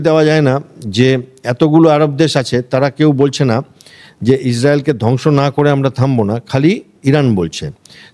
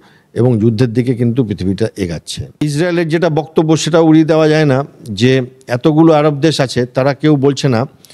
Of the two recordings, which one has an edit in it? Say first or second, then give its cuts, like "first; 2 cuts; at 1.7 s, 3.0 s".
second; 1 cut; at 2.5 s